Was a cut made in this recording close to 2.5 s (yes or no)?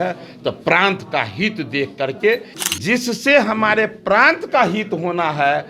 yes